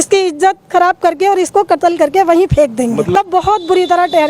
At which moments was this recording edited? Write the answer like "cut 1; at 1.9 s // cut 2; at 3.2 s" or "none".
cut 1; at 3.2 s